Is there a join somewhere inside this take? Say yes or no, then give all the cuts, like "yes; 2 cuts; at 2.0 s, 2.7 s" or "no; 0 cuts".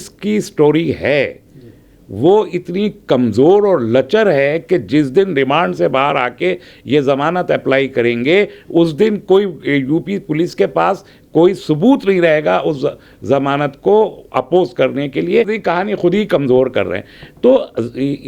yes; 1 cut; at 15.5 s